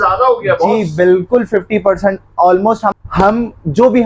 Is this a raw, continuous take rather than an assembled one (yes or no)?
no